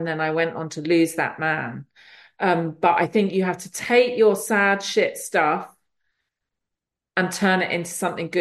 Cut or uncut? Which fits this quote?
uncut